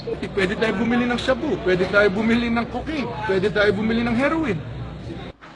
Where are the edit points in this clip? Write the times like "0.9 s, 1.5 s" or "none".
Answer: none